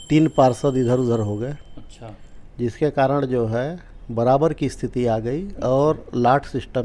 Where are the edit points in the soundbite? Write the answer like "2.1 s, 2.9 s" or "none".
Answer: none